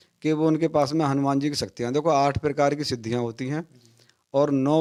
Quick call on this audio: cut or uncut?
uncut